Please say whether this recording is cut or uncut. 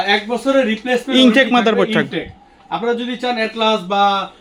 uncut